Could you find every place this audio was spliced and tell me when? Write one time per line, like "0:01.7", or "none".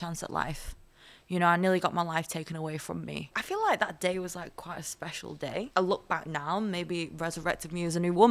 0:03.4
0:05.7